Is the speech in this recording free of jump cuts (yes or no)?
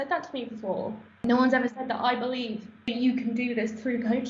no